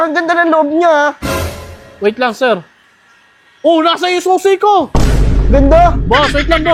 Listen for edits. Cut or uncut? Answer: uncut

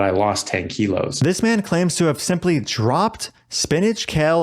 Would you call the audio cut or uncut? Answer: cut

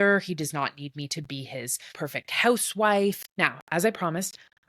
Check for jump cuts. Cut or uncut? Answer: cut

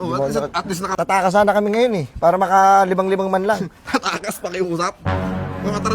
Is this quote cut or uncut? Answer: cut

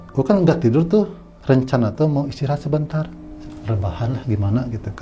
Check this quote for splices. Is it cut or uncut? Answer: cut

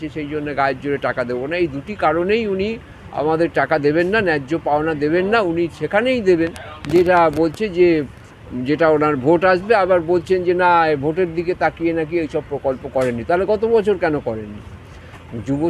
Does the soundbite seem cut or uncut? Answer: uncut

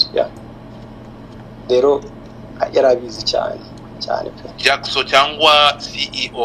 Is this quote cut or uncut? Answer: cut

